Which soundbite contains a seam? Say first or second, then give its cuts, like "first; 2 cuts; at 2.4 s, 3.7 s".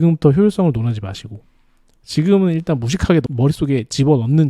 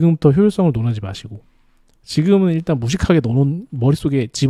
first; 1 cut; at 3.3 s